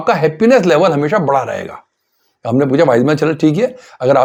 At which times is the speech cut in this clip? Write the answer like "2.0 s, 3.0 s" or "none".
none